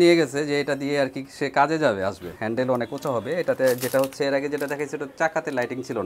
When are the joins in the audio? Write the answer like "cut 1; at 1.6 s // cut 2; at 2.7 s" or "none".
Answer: cut 1; at 2.3 s